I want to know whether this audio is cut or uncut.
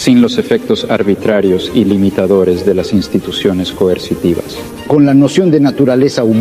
cut